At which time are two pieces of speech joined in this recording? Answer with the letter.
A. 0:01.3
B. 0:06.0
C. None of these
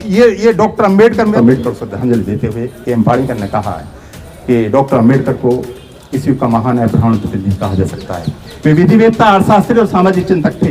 A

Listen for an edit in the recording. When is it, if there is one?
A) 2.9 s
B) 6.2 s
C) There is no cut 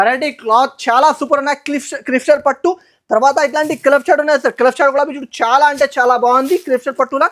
C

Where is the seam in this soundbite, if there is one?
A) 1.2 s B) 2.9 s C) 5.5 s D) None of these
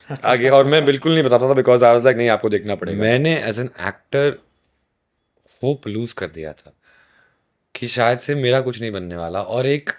B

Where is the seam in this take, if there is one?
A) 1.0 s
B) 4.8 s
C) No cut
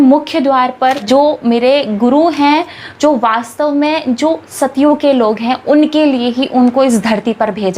A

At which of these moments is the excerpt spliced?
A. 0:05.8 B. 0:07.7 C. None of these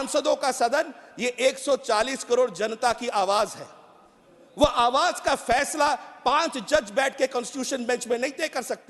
C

